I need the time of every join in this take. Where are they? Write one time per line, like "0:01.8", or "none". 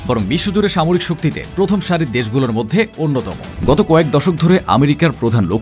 0:03.4